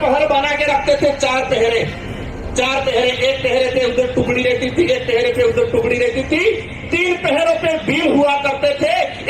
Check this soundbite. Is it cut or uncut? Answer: uncut